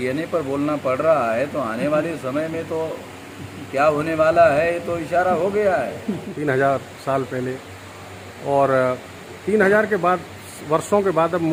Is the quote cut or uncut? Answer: uncut